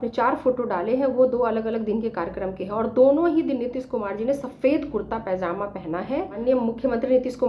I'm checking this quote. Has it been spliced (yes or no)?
yes